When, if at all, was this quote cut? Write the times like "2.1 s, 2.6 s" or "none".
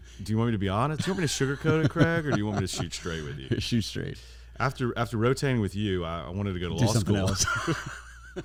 none